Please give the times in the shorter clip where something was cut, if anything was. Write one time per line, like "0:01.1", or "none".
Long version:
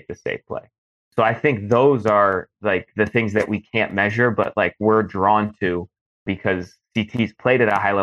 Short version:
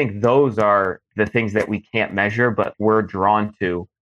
0:01.1
0:02.7